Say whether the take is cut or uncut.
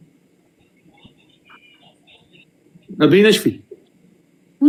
uncut